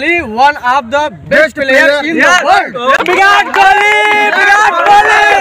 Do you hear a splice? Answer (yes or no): yes